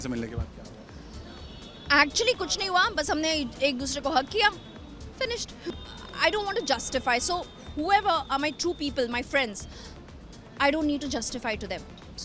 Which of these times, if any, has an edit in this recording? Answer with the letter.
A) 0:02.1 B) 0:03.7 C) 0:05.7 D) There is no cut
C